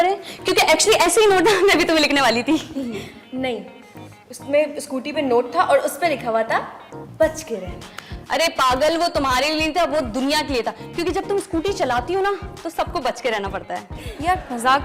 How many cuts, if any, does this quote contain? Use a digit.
0